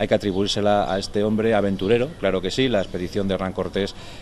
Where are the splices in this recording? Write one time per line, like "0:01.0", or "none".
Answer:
0:02.4